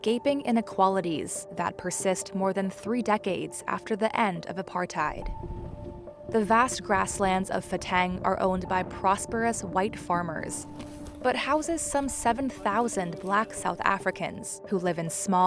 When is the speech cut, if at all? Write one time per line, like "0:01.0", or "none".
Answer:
none